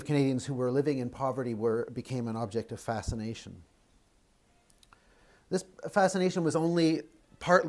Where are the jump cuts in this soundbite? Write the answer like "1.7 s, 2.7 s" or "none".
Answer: none